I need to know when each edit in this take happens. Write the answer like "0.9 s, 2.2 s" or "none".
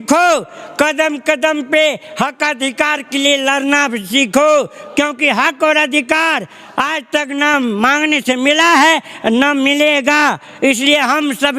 none